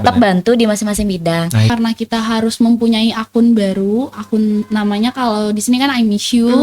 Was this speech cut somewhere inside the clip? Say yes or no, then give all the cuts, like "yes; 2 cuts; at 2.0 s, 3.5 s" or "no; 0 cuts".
yes; 1 cut; at 1.7 s